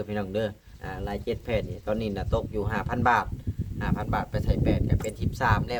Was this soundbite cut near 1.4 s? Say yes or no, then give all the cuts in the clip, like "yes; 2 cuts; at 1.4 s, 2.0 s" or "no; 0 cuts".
no; 0 cuts